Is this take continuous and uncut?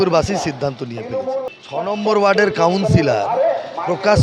no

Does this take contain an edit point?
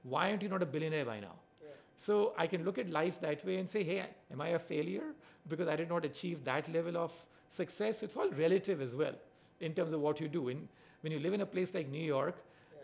no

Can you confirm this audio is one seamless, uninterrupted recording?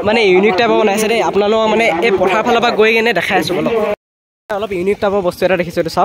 no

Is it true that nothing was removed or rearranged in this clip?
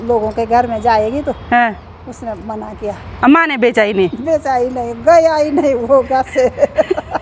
yes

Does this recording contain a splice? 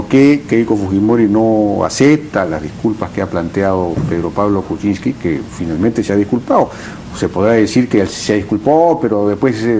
no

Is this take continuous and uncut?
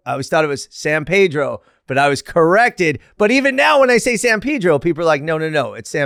yes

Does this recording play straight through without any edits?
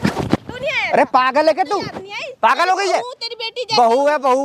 yes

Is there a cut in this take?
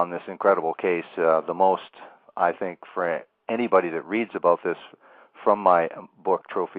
no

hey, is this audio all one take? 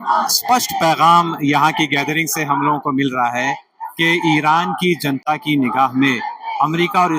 yes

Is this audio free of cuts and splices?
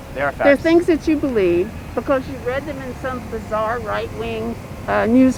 yes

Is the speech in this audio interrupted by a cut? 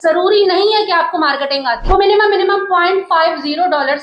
yes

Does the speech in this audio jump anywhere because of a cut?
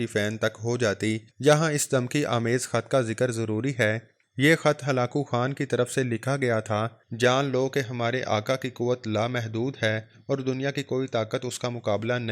yes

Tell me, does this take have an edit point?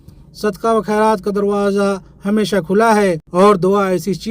yes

